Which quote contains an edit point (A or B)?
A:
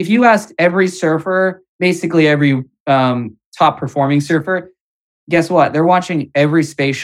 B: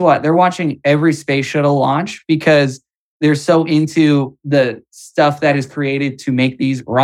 A